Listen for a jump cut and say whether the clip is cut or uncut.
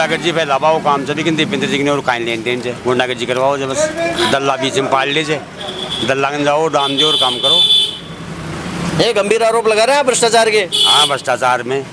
uncut